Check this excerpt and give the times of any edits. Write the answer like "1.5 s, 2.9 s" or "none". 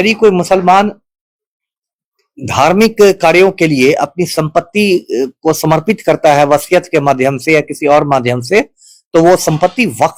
none